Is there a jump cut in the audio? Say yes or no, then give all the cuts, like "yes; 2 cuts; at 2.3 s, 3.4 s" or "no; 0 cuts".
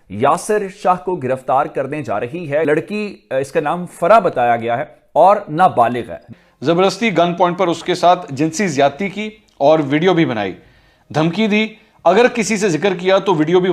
yes; 2 cuts; at 2.7 s, 6.2 s